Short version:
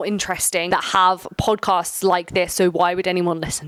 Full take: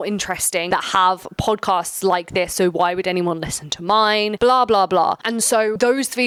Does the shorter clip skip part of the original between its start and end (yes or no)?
no